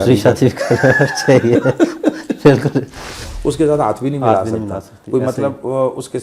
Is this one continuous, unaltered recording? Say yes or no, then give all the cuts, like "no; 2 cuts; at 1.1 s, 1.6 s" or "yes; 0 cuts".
no; 1 cut; at 3.2 s